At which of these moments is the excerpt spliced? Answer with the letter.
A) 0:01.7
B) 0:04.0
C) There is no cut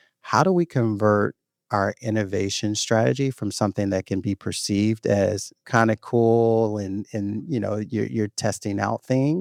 C